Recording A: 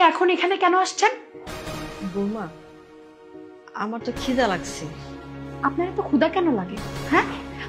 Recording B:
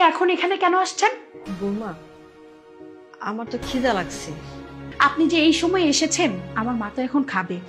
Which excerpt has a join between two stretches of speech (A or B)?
B